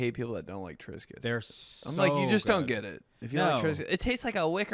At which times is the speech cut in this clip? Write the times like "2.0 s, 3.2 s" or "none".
1.2 s

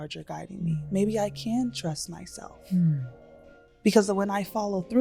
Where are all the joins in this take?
none

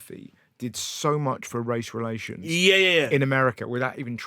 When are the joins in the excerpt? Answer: none

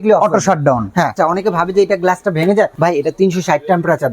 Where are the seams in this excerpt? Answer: 1.1 s, 2.7 s

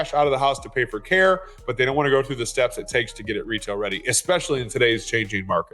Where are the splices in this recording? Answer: none

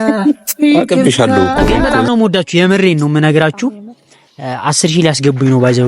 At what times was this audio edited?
1.9 s

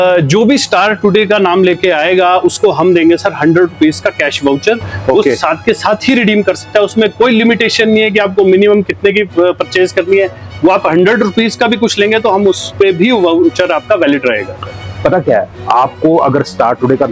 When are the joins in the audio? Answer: none

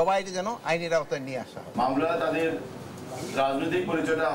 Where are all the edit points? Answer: 1.6 s

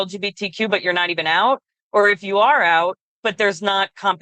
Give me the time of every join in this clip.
3.1 s

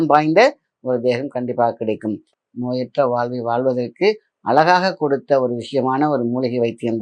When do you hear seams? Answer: 2.3 s

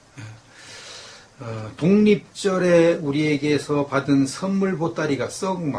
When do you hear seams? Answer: 4.5 s

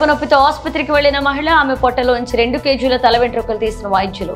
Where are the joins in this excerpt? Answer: none

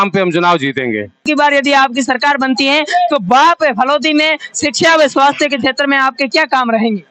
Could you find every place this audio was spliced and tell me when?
1.2 s

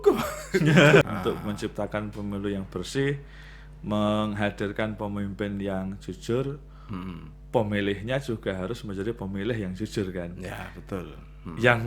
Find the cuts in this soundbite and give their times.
1.0 s

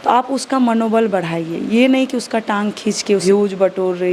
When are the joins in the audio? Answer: 3.2 s

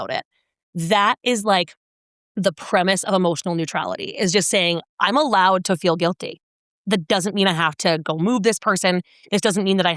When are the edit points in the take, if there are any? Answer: none

